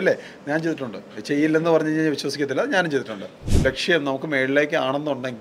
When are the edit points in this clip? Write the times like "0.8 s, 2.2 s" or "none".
3.4 s